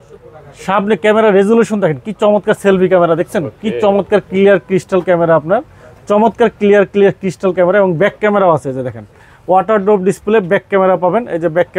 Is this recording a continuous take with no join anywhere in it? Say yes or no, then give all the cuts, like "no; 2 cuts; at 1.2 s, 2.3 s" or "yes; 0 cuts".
yes; 0 cuts